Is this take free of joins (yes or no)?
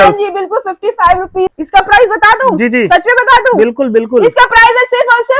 no